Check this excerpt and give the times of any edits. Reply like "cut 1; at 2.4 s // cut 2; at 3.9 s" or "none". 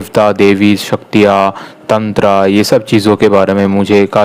none